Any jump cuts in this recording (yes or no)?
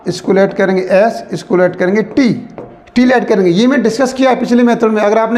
no